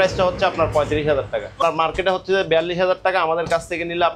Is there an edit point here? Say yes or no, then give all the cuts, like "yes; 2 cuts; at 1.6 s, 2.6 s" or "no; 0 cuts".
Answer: yes; 1 cut; at 1.6 s